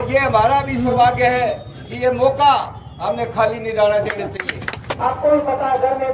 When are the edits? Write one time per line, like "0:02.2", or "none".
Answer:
0:04.9